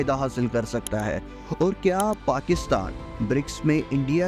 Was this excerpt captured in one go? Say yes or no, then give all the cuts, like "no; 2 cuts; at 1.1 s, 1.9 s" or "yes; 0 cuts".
yes; 0 cuts